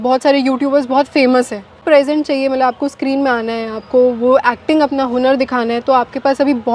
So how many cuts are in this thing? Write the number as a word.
one